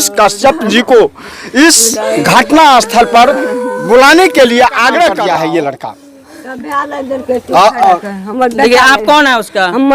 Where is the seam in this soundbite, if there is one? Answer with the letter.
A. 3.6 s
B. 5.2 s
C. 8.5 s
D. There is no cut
B